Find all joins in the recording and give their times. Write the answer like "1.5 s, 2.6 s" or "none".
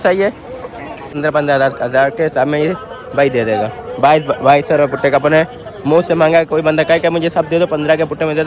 1.2 s